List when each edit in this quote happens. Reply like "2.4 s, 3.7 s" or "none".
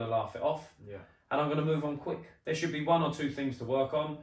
2.3 s